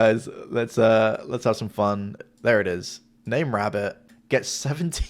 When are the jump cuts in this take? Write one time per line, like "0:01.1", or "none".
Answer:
0:02.2
0:04.1